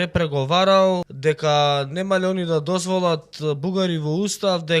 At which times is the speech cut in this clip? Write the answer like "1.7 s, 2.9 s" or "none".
1.1 s